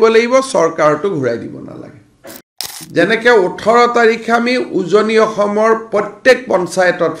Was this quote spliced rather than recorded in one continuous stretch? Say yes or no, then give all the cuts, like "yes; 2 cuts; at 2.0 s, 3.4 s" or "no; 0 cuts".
yes; 1 cut; at 2.8 s